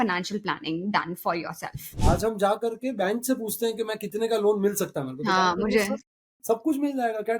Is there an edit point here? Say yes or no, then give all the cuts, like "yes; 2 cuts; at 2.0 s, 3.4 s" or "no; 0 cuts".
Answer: yes; 1 cut; at 2.0 s